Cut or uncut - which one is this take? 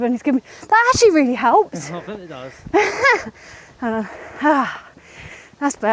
uncut